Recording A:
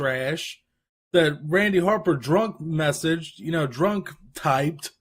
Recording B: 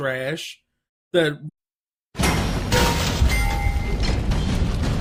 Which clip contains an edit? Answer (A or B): A